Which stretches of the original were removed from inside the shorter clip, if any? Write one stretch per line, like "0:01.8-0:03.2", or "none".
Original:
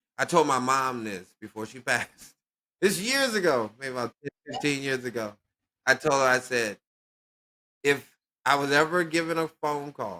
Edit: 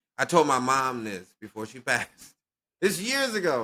none